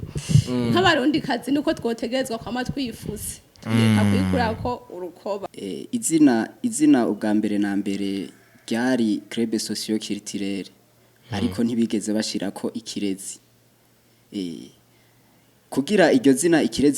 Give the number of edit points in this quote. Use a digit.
1